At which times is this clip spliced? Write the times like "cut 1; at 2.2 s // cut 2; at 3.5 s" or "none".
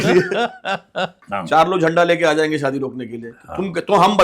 cut 1; at 1.1 s